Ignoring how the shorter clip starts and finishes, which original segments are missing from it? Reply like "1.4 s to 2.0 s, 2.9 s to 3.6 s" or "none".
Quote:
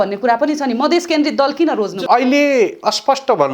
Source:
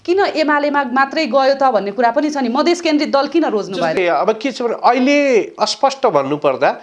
3.8 s to 4.8 s

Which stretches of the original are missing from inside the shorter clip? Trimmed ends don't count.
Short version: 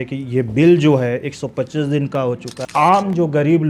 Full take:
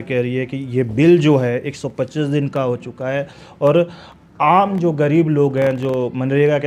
2.9 s to 4.2 s

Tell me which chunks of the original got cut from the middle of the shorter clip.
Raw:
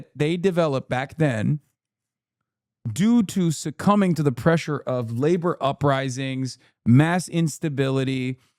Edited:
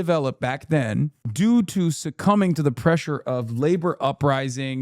1.7 s to 2.8 s

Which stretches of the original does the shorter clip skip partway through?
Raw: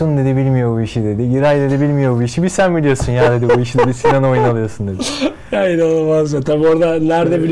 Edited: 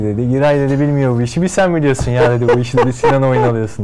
none

